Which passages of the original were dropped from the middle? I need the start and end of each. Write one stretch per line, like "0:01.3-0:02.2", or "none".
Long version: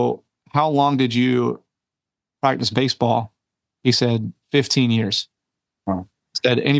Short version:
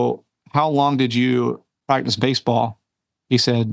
0:01.7-0:02.2